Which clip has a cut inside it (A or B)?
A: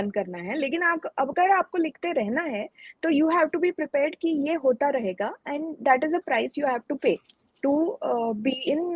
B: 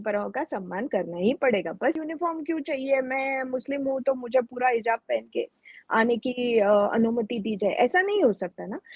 B